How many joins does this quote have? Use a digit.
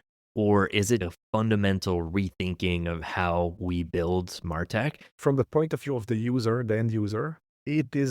2